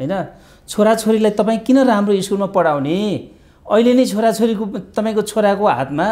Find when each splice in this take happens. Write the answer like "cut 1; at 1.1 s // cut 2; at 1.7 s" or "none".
none